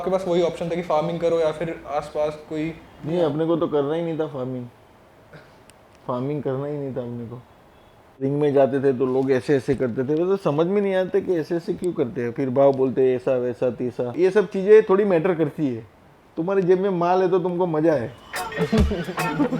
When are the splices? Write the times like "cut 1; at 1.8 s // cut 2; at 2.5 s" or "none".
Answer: cut 1; at 8.2 s // cut 2; at 14.1 s